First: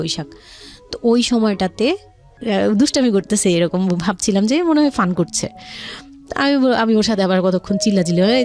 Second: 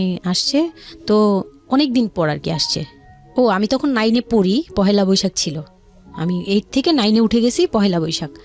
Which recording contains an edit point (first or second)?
first